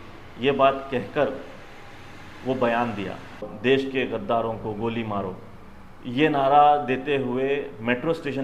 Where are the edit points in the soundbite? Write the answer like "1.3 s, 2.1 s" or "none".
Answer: 3.5 s